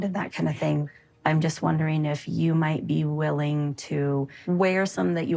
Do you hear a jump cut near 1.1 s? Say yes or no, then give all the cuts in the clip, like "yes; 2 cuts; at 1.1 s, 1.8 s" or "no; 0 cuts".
no; 1 cut; at 4.4 s